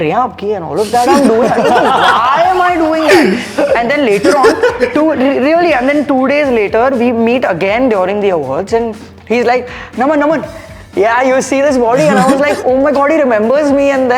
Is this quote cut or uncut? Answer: uncut